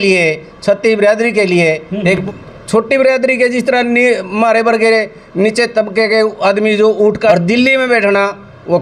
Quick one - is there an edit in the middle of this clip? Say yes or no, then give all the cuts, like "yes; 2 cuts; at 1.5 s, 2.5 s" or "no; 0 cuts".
yes; 2 cuts; at 2.2 s, 7.3 s